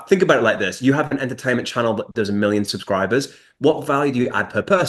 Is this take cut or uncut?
uncut